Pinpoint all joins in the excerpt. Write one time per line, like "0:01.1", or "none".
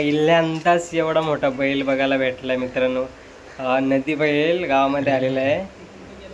none